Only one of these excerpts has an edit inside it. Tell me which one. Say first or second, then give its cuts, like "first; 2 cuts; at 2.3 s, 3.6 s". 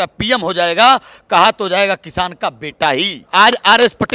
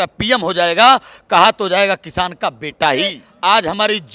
second; 1 cut; at 3.2 s